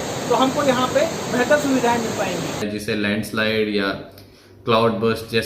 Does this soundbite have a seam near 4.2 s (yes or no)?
no